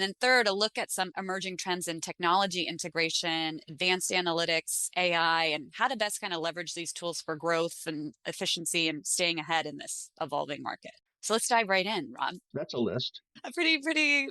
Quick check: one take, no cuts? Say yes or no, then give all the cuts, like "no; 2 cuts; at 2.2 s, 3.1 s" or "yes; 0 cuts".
no; 2 cuts; at 12.4 s, 13.2 s